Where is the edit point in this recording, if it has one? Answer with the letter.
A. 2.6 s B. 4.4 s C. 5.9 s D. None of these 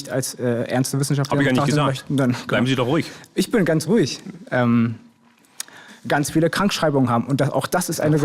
C